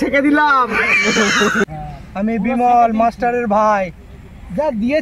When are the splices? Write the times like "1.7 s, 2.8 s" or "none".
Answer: 1.6 s